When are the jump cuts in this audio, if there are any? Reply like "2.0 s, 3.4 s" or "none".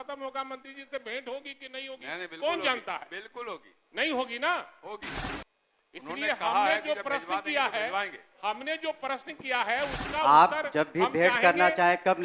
none